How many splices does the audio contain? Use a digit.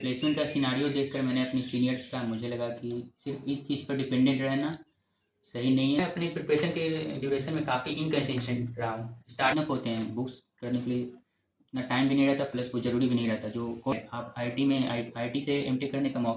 3